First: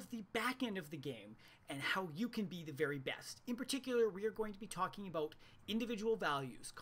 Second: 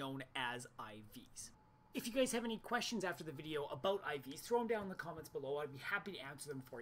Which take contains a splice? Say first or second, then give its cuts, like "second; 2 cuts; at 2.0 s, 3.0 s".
first; 1 cut; at 4.0 s